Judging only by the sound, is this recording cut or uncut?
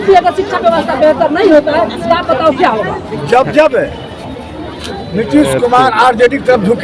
cut